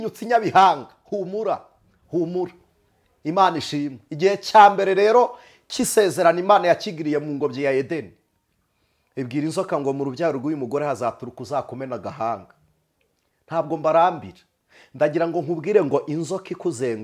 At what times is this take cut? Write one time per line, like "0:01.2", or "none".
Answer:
none